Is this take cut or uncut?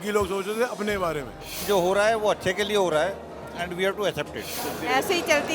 cut